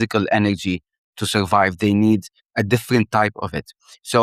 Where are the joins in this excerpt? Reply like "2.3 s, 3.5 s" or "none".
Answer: 2.4 s